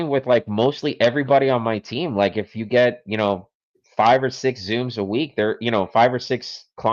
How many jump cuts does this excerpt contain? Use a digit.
0